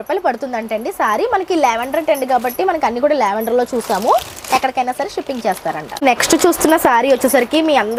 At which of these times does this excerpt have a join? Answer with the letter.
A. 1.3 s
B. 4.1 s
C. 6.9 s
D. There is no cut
D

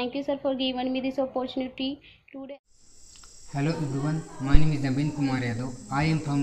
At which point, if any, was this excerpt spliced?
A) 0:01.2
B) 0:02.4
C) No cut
B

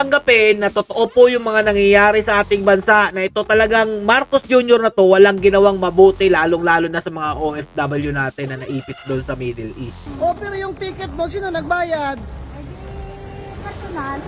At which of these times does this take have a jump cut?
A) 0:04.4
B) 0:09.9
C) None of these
B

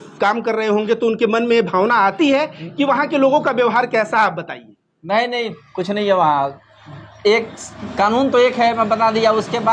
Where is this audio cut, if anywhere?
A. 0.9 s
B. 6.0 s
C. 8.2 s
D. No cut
D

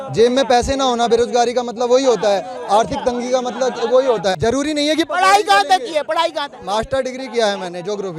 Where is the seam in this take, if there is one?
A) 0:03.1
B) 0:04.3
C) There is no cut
C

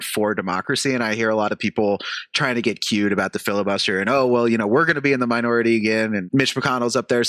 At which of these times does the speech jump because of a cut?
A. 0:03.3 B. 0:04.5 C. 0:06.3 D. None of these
C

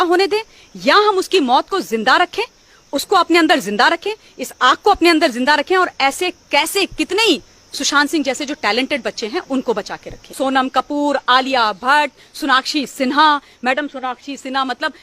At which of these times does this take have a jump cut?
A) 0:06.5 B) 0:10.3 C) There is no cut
B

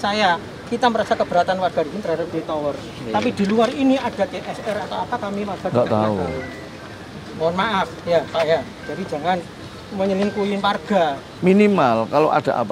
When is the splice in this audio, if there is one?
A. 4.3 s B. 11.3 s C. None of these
B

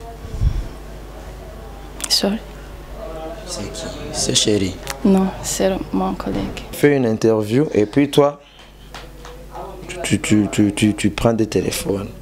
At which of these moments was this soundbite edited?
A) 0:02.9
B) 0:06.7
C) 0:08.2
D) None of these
B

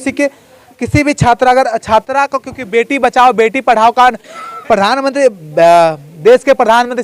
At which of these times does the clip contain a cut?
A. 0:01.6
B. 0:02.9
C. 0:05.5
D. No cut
D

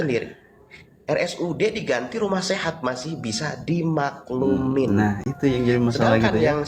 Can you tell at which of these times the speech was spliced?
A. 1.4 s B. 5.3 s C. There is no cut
C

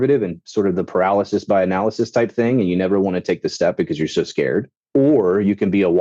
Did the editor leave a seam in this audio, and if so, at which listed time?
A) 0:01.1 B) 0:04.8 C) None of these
B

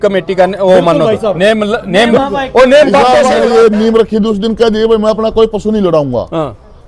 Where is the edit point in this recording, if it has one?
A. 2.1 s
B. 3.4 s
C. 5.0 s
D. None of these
B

